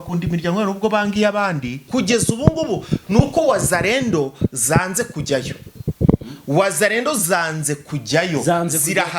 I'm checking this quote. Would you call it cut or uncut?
cut